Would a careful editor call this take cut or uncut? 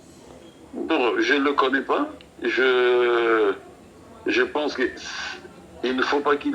uncut